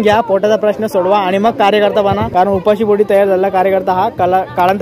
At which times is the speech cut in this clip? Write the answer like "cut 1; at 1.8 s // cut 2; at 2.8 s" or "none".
cut 1; at 2.2 s